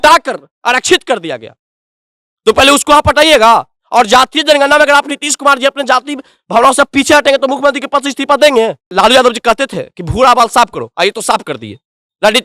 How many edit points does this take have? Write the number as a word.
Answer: one